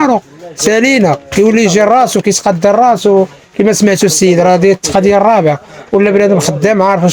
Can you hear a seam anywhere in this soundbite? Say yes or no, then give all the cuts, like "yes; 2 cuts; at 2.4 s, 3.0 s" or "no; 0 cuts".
no; 0 cuts